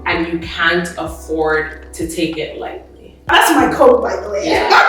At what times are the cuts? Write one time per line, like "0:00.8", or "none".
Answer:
0:03.3

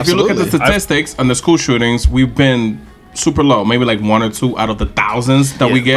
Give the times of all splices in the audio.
none

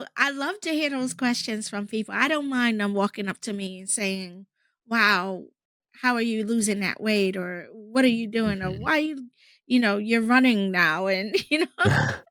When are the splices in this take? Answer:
none

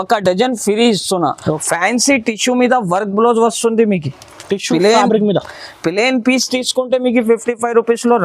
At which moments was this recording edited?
0:01.6

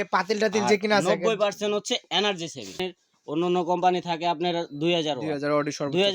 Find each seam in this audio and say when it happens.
0:02.9

